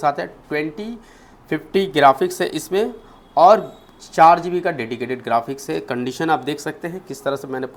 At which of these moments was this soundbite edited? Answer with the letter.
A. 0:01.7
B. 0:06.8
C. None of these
C